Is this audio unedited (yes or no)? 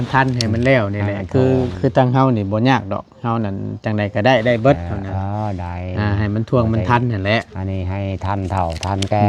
yes